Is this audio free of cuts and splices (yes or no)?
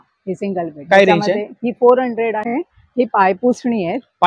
no